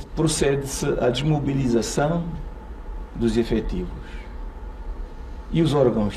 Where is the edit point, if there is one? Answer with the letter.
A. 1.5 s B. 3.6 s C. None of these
C